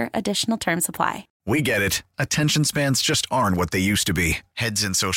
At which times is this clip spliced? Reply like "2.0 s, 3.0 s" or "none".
1.3 s